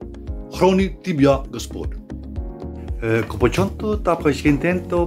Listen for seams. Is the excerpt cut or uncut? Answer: uncut